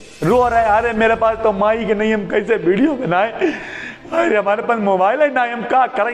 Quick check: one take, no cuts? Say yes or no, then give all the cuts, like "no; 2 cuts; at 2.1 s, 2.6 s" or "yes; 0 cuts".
yes; 0 cuts